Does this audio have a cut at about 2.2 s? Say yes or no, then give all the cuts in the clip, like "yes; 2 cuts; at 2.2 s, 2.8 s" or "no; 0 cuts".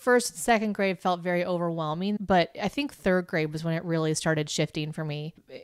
yes; 1 cut; at 2.2 s